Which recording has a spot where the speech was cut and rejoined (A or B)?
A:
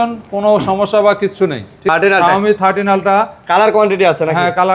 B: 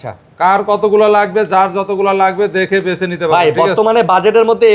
A